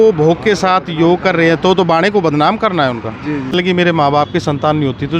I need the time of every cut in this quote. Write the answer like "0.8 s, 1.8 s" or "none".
3.5 s